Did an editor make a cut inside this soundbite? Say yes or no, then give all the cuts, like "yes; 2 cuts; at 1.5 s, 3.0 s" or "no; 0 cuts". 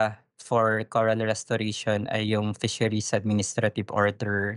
no; 0 cuts